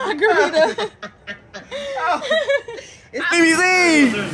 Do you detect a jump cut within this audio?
yes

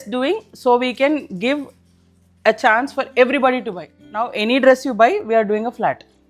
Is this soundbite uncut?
no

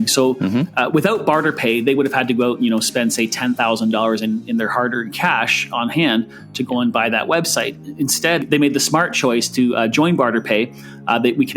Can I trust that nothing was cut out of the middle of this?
no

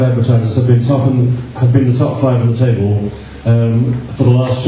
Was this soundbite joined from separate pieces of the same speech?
yes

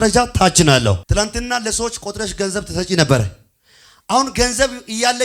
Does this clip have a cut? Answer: yes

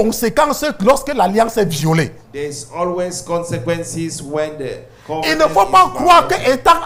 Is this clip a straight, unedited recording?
yes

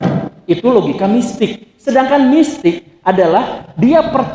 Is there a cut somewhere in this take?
no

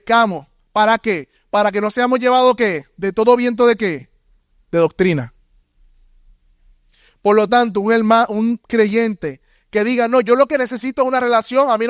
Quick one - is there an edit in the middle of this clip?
no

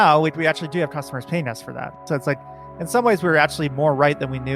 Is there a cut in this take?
yes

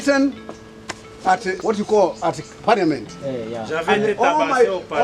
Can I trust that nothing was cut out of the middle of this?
no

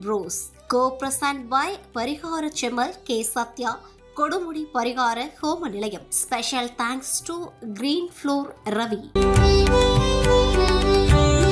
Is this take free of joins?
yes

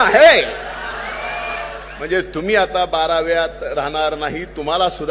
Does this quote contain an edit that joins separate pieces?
yes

